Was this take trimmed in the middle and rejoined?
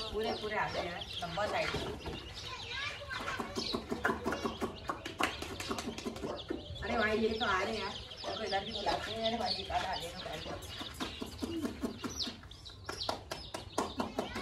no; 0 cuts

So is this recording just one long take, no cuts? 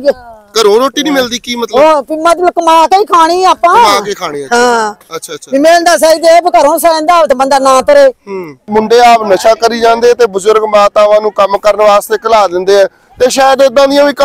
no; 1 cut; at 8.7 s

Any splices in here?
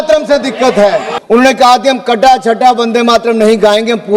yes; 1 cut; at 1.1 s

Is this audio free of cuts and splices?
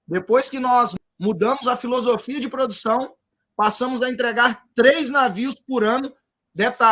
no; 1 cut; at 0.9 s

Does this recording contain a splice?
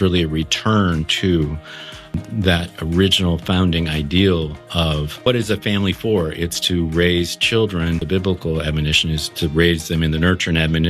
yes; 3 cuts; at 2.2 s, 5.3 s, 8.0 s

